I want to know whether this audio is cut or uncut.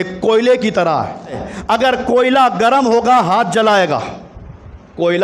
cut